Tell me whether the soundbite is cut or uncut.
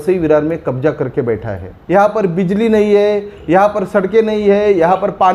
cut